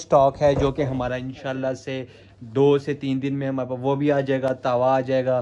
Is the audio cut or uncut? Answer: uncut